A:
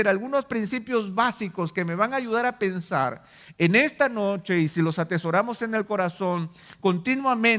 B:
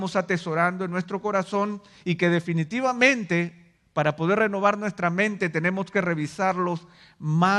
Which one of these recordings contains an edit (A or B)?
A